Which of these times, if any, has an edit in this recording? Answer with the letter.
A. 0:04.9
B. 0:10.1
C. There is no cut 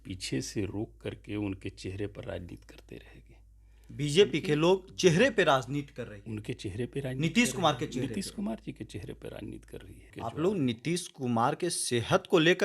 B